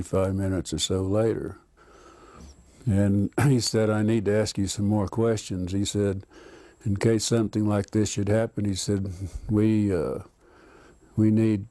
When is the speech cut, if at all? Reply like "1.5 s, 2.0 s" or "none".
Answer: none